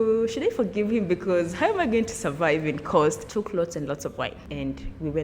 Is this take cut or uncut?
cut